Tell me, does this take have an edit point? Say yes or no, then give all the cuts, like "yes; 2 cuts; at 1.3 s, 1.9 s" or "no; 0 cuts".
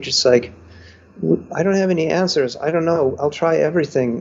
no; 0 cuts